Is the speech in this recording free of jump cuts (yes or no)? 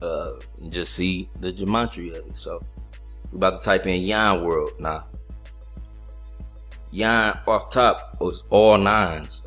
yes